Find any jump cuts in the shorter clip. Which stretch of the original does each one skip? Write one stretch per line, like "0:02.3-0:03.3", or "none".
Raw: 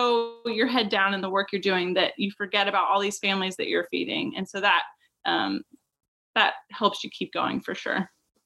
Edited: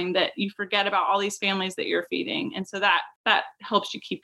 0:04.9-0:06.2